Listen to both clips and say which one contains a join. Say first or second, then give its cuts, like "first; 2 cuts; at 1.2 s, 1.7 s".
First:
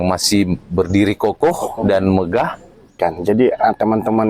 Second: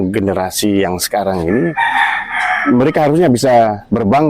first; 1 cut; at 2.9 s